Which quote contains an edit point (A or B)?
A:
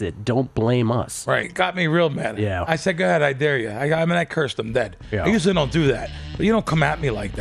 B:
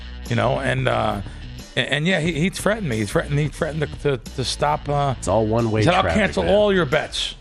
A